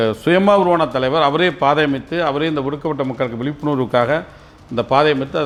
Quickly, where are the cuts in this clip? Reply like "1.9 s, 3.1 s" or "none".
none